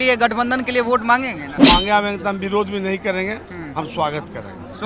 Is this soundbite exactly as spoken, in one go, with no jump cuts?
no; 1 cut; at 1.5 s

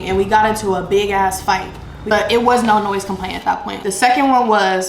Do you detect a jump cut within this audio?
yes; 1 cut; at 3.7 s

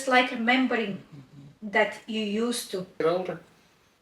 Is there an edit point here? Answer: yes; 1 cut; at 3.0 s

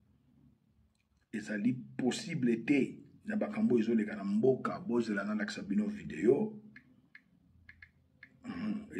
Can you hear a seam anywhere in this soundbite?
no; 0 cuts

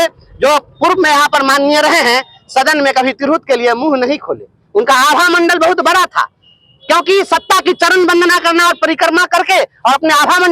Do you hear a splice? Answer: no; 0 cuts

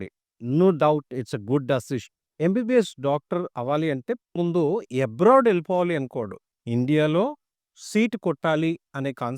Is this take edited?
yes; 2 cuts; at 2.3 s, 4.4 s

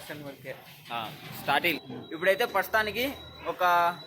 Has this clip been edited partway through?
yes; 1 cut; at 1.9 s

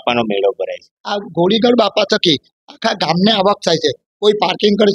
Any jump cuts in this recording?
yes; 1 cut; at 0.9 s

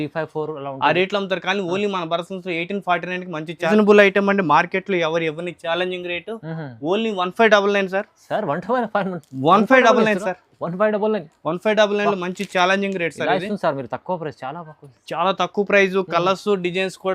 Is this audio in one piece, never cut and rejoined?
no; 1 cut; at 3.7 s

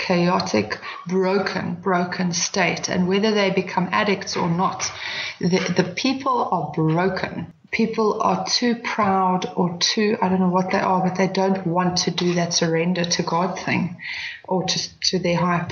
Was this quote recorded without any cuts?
no; 1 cut; at 7.4 s

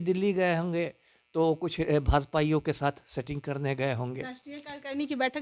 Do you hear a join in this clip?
no; 0 cuts

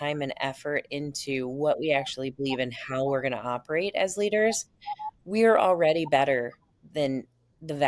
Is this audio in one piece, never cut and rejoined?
yes; 0 cuts

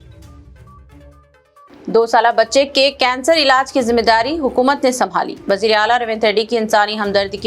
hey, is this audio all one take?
no; 1 cut; at 1.0 s

